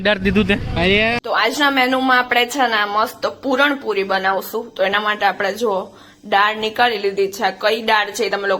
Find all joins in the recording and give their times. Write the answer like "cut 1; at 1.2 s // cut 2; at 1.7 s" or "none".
cut 1; at 1.2 s